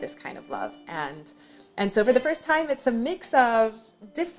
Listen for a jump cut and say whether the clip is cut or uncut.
uncut